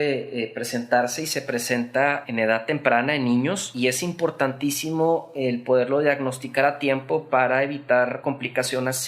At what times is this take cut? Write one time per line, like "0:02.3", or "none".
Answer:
0:02.2
0:03.7
0:08.2